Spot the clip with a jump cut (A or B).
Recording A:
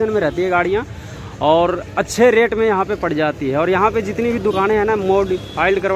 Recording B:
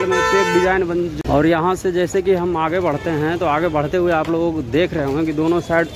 B